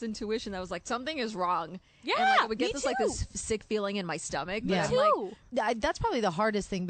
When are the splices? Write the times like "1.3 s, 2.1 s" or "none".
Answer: 5.4 s